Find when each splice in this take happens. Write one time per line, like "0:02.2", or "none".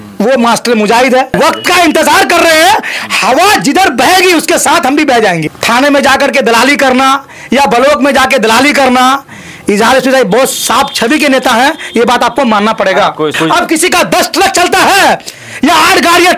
0:01.3
0:05.5
0:13.3